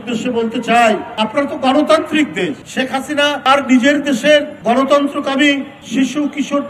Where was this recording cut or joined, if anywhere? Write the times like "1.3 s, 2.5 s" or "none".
1.1 s, 2.6 s, 3.5 s, 4.5 s, 5.8 s